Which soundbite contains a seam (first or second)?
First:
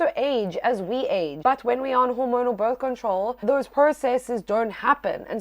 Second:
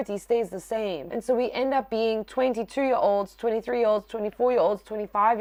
first